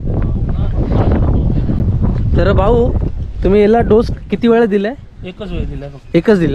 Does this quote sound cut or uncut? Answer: uncut